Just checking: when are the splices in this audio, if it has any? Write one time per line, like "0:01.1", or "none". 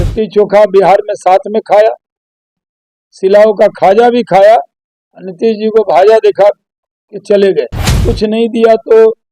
0:07.8

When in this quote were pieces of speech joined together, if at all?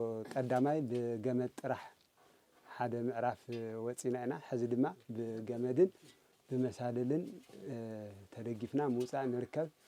none

